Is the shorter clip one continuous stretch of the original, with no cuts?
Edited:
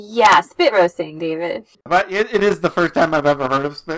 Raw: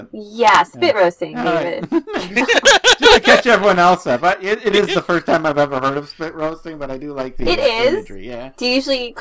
no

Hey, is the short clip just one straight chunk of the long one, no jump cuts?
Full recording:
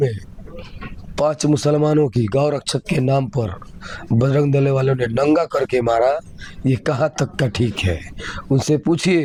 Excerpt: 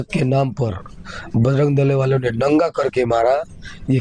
yes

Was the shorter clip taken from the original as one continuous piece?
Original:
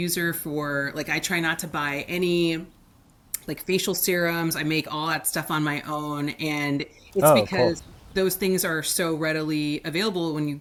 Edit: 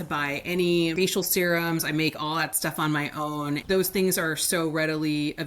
no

